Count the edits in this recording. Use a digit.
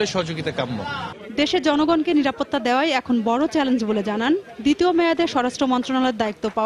0